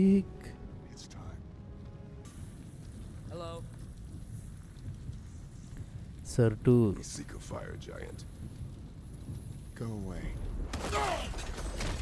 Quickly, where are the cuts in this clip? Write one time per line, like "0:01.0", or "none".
0:02.2

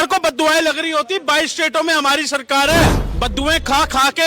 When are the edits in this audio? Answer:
0:03.0

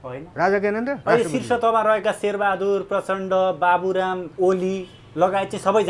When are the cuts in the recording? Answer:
0:01.0
0:04.3

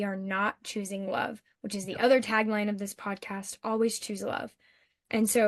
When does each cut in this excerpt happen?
none

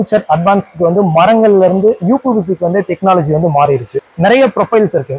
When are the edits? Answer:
0:04.0

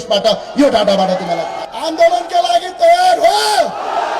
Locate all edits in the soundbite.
0:01.6

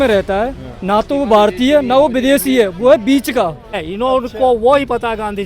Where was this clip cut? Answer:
0:03.8

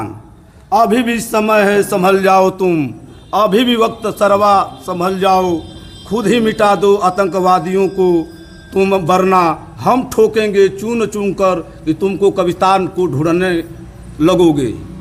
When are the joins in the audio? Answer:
none

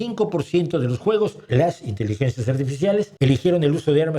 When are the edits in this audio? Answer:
0:01.4
0:03.1

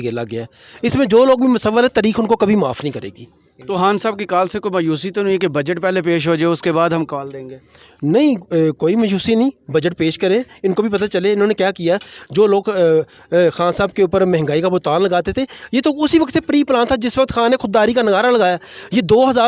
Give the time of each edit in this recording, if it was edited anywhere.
none

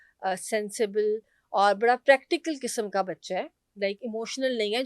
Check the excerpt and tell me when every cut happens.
none

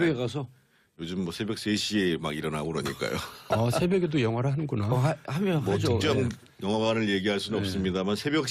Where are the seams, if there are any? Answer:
none

